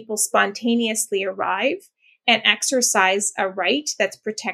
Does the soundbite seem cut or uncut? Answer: uncut